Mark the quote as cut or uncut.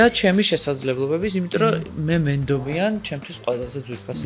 uncut